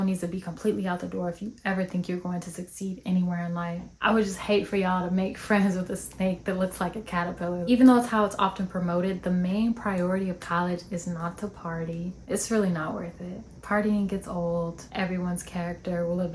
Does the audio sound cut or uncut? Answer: cut